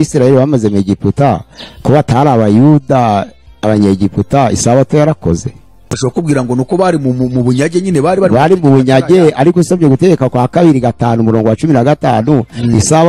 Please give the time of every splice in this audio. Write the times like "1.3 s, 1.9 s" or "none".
5.9 s